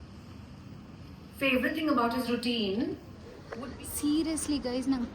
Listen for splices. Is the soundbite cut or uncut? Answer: cut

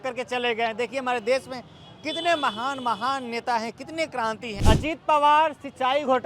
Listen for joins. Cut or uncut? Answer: cut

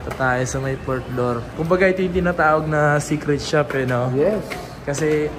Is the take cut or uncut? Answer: uncut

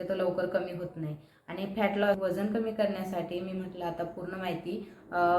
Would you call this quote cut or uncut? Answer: cut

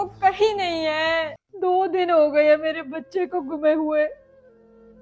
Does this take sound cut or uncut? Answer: cut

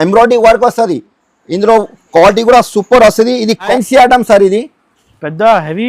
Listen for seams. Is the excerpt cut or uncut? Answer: cut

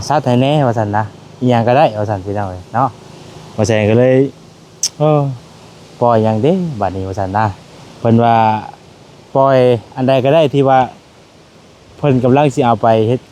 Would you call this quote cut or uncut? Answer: uncut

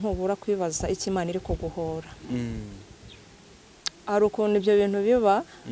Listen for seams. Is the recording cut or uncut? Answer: uncut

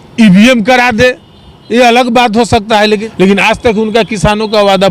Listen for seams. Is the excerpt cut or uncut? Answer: cut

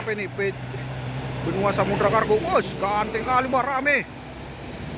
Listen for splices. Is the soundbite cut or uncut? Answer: uncut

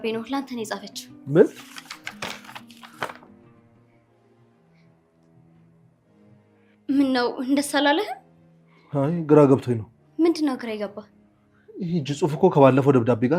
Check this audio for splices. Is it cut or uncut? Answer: uncut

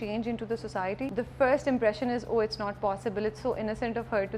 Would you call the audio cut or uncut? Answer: cut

